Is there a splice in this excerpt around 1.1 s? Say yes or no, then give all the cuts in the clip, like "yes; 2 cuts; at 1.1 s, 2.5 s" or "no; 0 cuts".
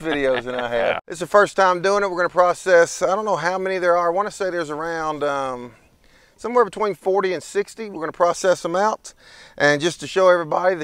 yes; 1 cut; at 1.1 s